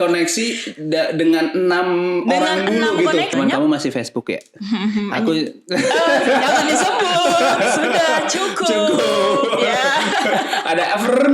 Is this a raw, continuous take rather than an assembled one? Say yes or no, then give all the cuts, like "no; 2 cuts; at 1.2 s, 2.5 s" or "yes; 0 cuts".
no; 1 cut; at 3.3 s